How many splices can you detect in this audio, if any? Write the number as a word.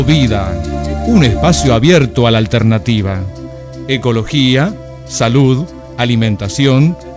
zero